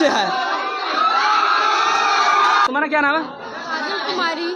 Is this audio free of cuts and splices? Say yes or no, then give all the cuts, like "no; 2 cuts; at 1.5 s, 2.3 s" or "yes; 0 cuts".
no; 1 cut; at 2.7 s